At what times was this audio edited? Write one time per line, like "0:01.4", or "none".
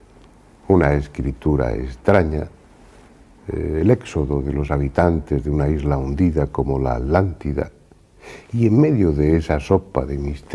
none